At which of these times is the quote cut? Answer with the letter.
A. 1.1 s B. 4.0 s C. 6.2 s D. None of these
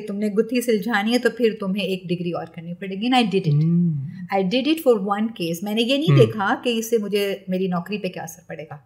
D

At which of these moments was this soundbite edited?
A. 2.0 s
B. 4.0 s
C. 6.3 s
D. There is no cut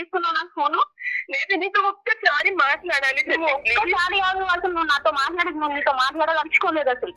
D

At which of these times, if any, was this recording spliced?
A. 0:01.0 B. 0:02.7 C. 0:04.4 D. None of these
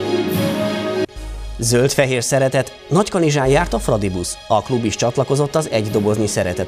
A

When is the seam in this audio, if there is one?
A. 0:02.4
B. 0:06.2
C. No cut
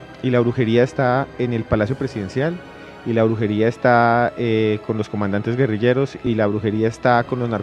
B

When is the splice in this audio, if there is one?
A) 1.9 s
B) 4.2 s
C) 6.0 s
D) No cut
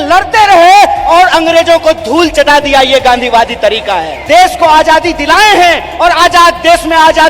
B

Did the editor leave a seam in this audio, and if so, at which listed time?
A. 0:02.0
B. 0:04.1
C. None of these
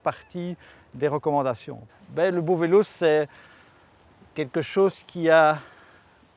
A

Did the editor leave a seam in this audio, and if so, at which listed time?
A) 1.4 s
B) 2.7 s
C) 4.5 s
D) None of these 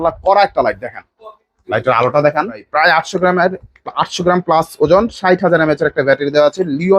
B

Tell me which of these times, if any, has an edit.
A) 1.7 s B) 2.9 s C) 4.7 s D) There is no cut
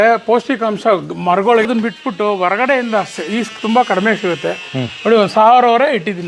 A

